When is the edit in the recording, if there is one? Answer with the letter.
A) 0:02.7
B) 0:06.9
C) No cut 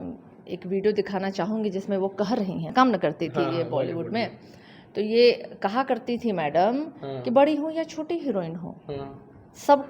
A